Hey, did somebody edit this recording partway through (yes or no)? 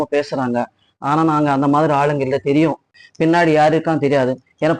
yes